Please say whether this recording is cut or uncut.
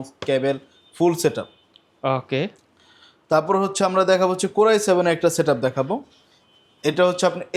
uncut